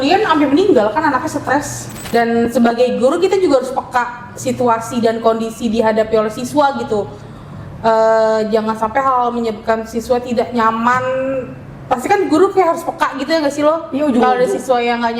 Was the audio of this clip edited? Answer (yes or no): yes